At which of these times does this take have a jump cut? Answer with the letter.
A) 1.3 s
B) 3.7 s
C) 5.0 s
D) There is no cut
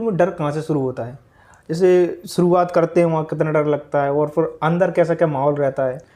D